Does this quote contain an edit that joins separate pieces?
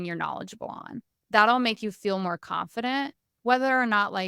no; 0 cuts

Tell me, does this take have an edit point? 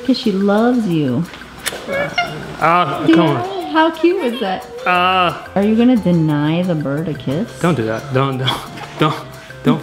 yes; 1 cut; at 5.4 s

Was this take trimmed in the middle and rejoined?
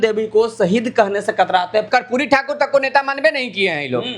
yes; 1 cut; at 1.9 s

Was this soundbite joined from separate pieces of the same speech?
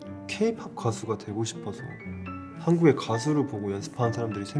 no; 0 cuts

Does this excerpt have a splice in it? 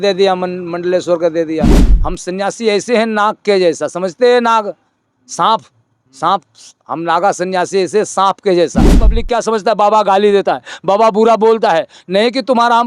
yes; 2 cuts; at 1.9 s, 9.2 s

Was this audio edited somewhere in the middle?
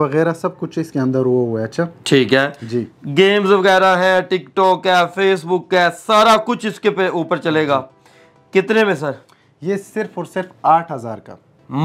no; 0 cuts

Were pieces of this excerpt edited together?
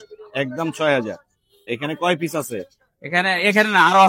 no; 0 cuts

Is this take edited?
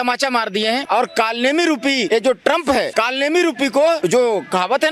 yes; 4 cuts; at 0.8 s, 2.0 s, 2.9 s, 4.0 s

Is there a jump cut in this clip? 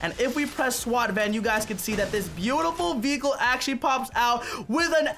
no; 0 cuts

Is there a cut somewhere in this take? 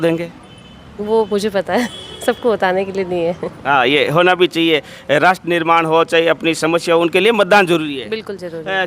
no; 0 cuts

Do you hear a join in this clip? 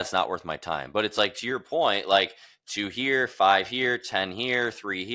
no; 0 cuts

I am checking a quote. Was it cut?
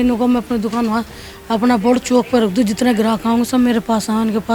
no; 0 cuts

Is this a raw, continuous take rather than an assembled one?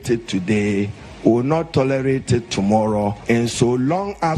no; 1 cut; at 3.2 s

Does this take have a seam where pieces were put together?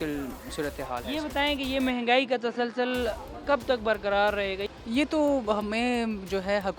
no; 0 cuts

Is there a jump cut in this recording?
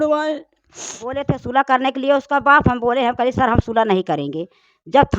yes; 1 cut; at 1.2 s

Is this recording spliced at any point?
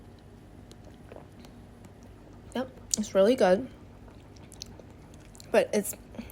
no; 0 cuts

